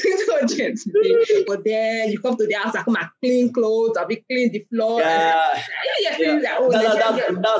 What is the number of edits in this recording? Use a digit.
1